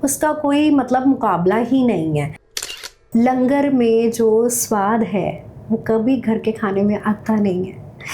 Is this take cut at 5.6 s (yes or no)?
no